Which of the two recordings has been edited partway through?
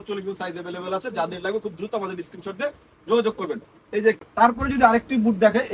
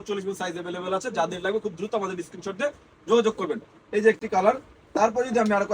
first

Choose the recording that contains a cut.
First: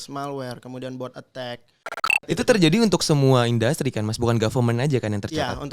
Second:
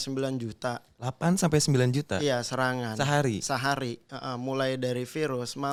first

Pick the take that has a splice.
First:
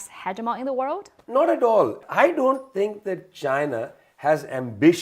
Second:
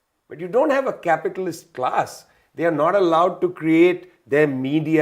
first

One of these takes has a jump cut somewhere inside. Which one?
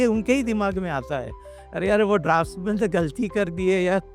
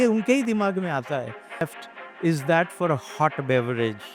second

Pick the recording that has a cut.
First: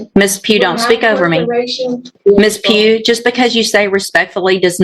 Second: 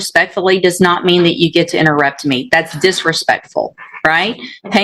first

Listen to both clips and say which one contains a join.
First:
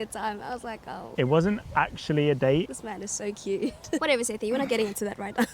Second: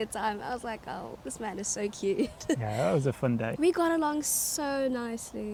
first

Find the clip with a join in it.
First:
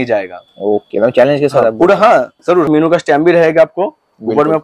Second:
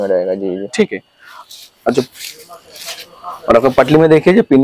first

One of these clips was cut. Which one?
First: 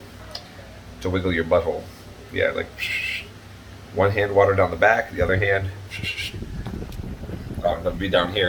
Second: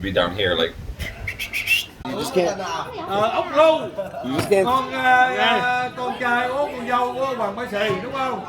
second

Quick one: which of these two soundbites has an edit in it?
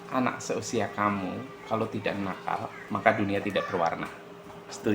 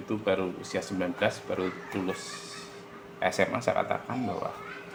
first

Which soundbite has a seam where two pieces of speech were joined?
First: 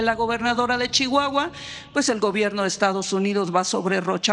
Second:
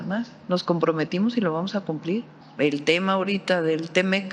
second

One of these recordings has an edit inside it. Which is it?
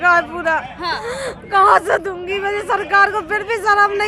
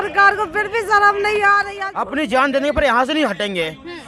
second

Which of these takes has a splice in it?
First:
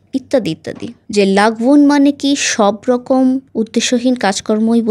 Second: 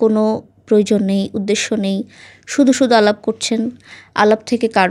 first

